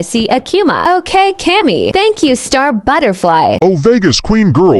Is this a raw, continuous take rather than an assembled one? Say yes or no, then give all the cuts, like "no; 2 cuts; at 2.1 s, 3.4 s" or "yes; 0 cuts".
no; 1 cut; at 3.6 s